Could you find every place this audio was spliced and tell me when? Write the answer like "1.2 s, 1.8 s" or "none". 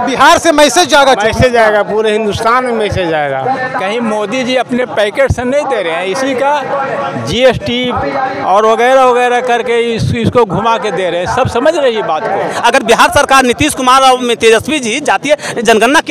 3.4 s, 12.5 s